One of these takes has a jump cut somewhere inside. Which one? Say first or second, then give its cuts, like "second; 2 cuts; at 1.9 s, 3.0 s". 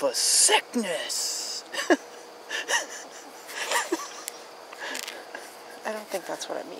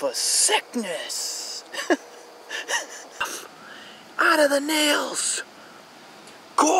second; 1 cut; at 3.3 s